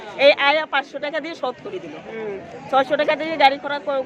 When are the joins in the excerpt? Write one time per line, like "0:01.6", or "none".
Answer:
0:02.0